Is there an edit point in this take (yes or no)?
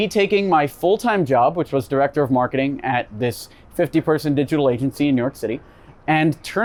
no